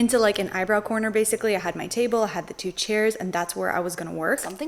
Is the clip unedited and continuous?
yes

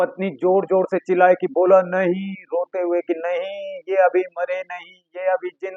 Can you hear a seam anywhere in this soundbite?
no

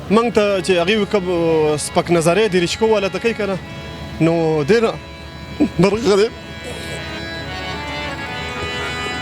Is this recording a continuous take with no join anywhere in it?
yes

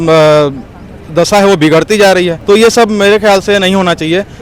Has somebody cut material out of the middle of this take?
yes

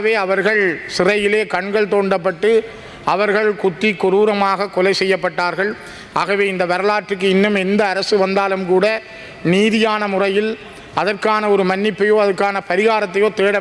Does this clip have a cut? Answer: no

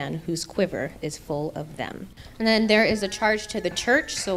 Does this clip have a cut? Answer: yes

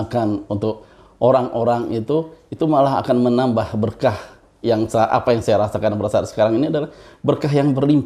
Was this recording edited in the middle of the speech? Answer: no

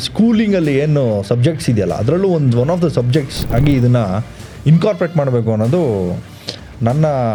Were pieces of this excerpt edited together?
no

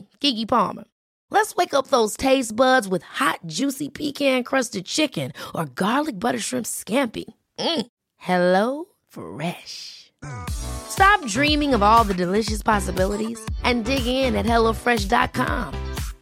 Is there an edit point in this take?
no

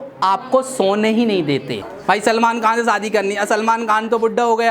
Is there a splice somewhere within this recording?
yes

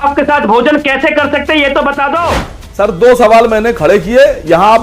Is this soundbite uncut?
no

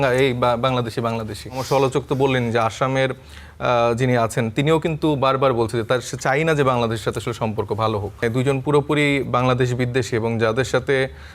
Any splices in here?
yes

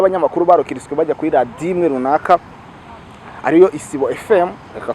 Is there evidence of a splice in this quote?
no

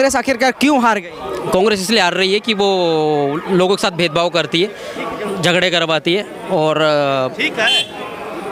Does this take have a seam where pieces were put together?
no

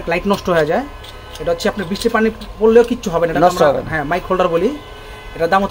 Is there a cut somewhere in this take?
no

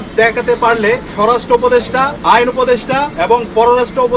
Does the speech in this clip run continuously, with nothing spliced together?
no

